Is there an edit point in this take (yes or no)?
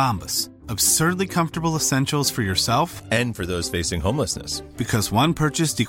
no